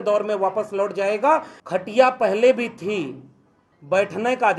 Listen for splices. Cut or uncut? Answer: cut